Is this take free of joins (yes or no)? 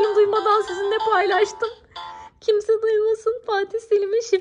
yes